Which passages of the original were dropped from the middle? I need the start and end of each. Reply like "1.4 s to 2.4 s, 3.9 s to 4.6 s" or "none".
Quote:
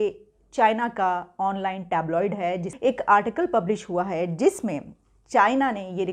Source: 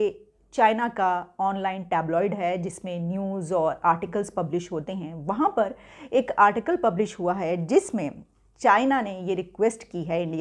2.7 s to 6.0 s